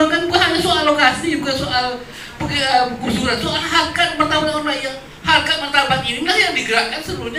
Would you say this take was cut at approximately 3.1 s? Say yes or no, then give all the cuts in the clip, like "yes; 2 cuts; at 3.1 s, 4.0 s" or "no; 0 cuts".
no; 0 cuts